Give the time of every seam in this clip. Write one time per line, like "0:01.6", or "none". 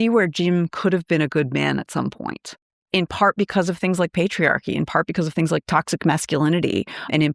0:02.8